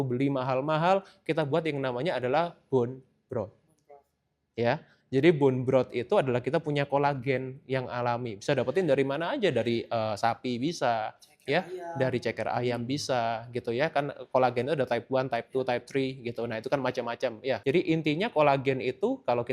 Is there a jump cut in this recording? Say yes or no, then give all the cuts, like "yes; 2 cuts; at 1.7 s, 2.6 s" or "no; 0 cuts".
yes; 1 cut; at 17.6 s